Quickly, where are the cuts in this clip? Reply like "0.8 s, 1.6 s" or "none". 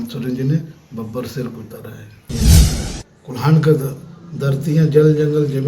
2.7 s